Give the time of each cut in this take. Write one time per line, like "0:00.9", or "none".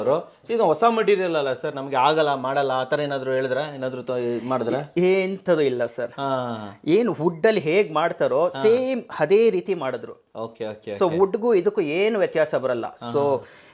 none